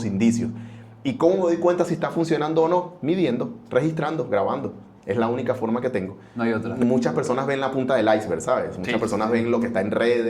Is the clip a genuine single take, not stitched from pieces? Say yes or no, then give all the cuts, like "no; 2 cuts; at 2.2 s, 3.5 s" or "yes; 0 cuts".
no; 1 cut; at 6.7 s